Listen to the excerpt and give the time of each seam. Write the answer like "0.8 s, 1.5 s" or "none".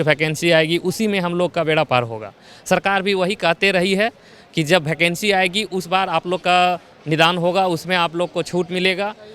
none